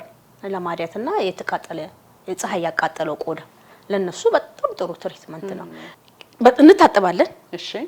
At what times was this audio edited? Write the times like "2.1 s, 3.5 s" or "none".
5.8 s